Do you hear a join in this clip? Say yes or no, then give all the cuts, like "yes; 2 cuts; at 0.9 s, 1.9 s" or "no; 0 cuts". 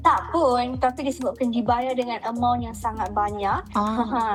no; 0 cuts